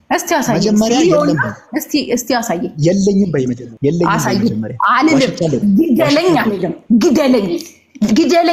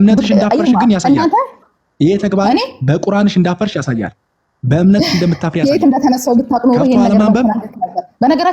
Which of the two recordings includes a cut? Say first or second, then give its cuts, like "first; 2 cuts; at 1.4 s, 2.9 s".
first; 1 cut; at 3.7 s